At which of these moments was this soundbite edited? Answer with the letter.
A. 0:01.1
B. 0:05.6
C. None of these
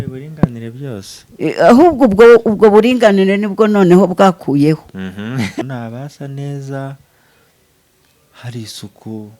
B